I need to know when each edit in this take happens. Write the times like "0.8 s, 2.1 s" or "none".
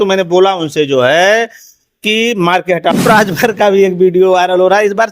3.0 s